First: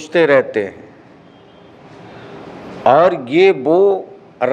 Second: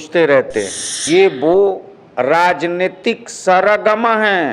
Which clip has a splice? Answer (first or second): second